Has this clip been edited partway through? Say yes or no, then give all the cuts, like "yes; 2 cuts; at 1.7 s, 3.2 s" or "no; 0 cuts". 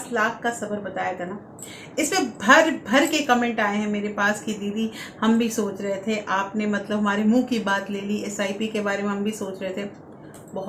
no; 0 cuts